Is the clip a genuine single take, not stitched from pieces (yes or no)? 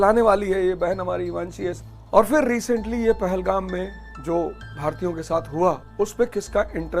no